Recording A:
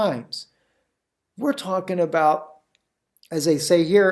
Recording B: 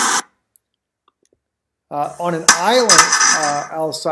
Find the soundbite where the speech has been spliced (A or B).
B